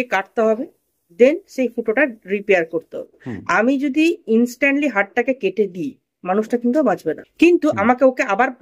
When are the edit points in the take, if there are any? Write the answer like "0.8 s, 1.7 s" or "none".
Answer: 3.4 s, 7.2 s